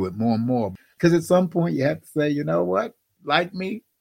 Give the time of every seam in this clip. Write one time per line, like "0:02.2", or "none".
0:00.9
0:03.1